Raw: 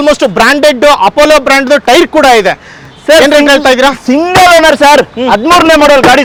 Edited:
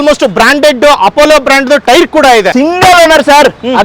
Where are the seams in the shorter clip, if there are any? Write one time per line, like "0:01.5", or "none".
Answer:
0:02.5